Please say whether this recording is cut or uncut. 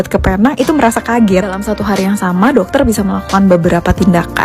uncut